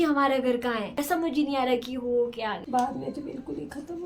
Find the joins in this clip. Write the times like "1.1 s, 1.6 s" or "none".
1.0 s, 2.6 s